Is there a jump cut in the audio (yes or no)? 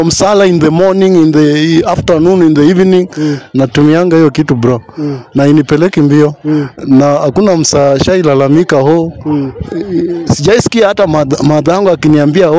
no